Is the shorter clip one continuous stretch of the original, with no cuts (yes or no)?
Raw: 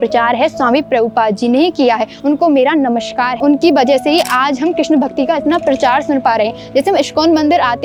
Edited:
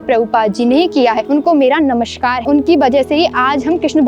no